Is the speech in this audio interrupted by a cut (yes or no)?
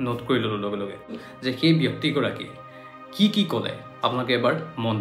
yes